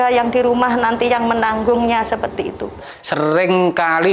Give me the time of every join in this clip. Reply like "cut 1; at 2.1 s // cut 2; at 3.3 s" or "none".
cut 1; at 2.9 s